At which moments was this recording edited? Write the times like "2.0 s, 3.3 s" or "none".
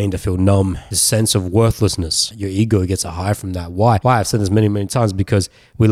0.9 s, 2.3 s, 4.0 s